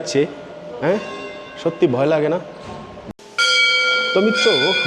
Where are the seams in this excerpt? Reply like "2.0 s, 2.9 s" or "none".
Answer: 3.0 s